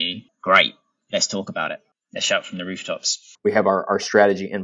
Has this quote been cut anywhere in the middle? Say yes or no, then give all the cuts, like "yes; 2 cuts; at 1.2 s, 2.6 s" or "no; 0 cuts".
yes; 1 cut; at 3.2 s